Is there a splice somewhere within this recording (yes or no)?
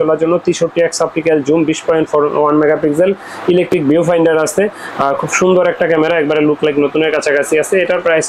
no